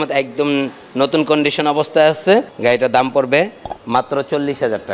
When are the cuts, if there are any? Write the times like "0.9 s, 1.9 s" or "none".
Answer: 2.5 s